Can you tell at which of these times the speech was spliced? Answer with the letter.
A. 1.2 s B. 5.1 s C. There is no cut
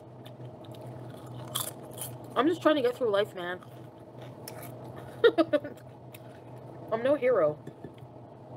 C